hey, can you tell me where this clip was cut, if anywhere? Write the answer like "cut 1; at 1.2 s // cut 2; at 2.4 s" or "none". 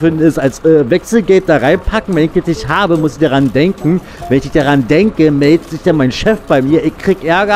none